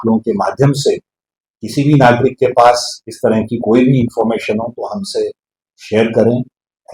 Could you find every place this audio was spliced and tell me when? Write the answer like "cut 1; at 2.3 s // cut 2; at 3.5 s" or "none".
none

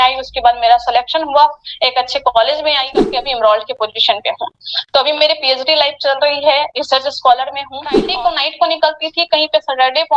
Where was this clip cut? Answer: cut 1; at 3.1 s // cut 2; at 8.0 s

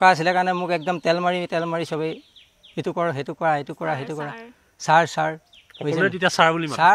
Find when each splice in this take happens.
none

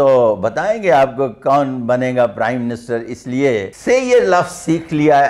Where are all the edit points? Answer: cut 1; at 3.7 s

